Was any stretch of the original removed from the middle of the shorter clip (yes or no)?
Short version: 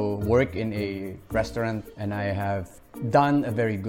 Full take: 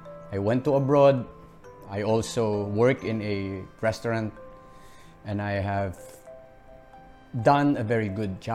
yes